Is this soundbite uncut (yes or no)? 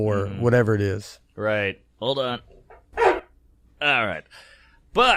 yes